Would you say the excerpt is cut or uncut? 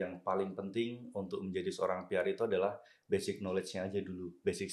uncut